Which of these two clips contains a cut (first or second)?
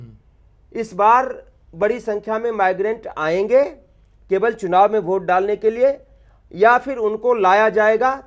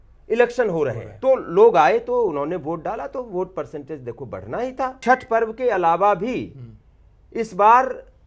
second